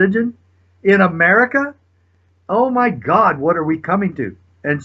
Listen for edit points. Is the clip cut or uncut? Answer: uncut